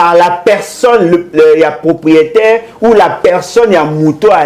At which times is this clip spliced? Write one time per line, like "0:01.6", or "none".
none